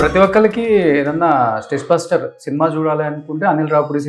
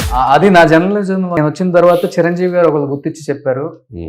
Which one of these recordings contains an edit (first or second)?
second